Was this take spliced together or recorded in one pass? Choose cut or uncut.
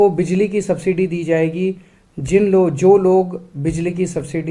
uncut